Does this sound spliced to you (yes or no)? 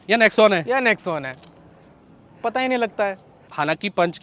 no